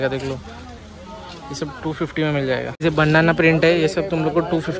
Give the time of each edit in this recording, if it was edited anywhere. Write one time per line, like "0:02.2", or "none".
0:02.4